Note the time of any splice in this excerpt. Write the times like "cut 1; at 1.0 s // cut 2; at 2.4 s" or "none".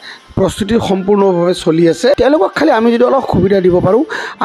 cut 1; at 2.2 s